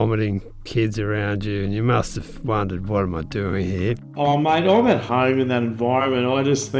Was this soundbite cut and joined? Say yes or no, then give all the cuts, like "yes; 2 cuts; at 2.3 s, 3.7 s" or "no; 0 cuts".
yes; 2 cuts; at 4.1 s, 5.1 s